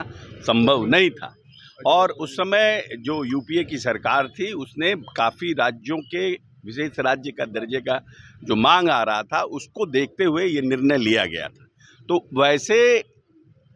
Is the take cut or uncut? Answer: uncut